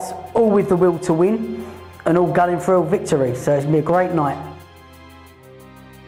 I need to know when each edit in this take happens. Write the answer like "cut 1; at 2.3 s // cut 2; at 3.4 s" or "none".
none